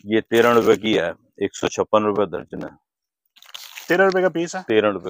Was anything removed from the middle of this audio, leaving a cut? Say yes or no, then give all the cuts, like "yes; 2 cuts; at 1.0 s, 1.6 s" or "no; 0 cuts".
no; 0 cuts